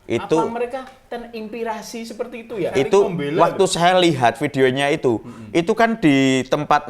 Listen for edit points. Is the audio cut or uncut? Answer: cut